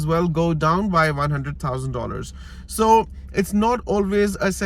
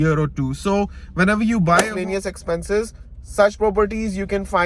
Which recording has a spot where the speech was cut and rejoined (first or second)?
second